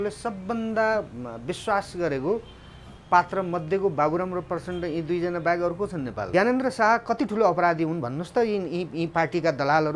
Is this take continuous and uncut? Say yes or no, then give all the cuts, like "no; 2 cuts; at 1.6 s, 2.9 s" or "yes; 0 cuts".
no; 1 cut; at 6.2 s